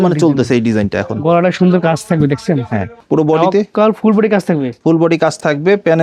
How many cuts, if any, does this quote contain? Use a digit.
1